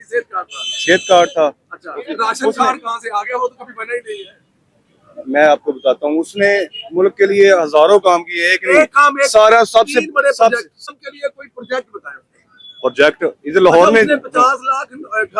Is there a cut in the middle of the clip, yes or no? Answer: yes